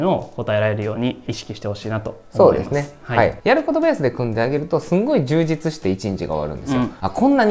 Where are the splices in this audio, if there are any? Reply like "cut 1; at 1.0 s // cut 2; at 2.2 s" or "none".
none